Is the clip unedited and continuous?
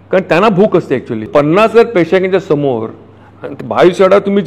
no; 1 cut; at 1.3 s

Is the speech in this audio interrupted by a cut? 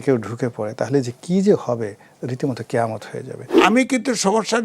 yes; 1 cut; at 3.5 s

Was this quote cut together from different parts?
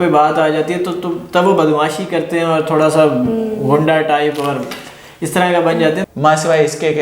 yes; 1 cut; at 6.0 s

